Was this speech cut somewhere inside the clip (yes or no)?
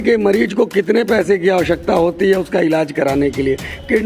no